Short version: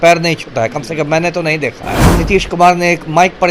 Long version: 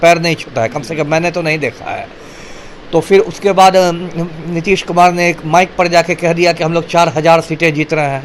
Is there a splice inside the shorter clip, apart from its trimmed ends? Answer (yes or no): yes